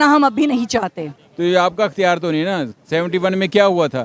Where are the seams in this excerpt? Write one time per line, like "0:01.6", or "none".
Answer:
0:01.2